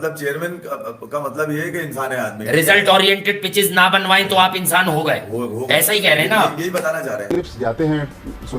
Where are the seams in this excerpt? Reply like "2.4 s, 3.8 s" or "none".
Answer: 7.2 s

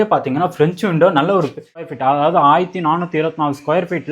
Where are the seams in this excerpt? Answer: 1.8 s

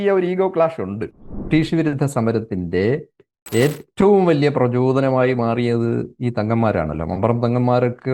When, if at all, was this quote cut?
1.5 s

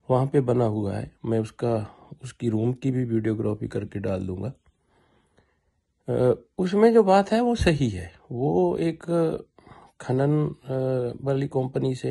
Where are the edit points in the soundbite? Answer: none

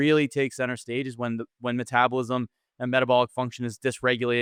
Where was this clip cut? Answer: none

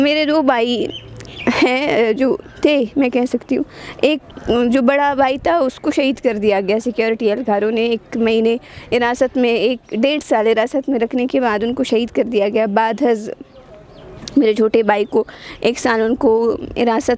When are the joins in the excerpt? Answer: none

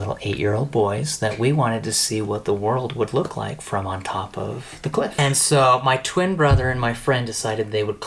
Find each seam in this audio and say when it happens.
5.1 s

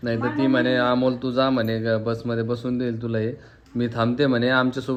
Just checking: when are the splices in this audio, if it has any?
none

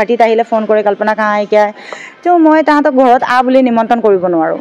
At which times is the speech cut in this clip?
none

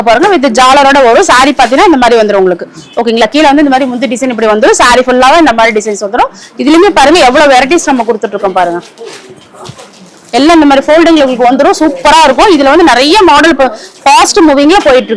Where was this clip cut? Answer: none

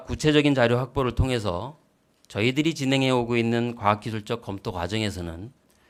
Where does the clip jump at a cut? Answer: none

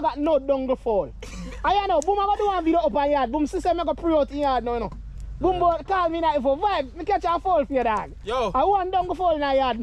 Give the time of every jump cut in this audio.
none

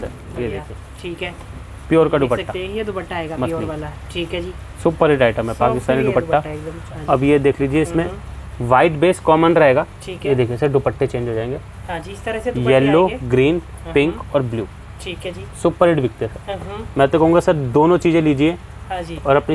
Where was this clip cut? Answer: none

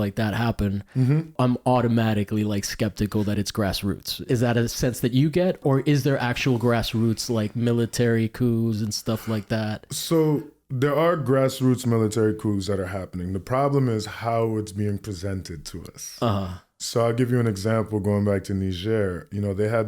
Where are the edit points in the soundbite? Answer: 1.3 s, 4.2 s, 5.6 s

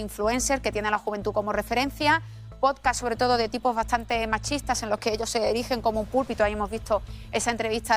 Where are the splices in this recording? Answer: none

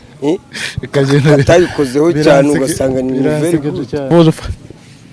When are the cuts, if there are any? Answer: 4.1 s

